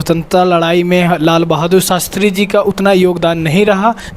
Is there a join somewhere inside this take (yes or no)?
no